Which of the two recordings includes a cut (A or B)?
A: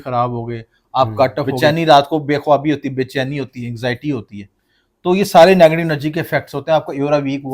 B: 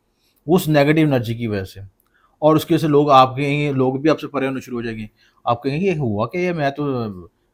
A